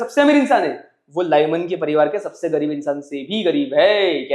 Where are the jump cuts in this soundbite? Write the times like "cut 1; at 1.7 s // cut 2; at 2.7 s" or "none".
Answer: none